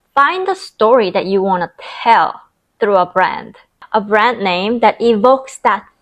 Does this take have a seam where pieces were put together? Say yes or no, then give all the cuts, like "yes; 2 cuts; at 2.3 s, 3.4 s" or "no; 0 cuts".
yes; 1 cut; at 3.8 s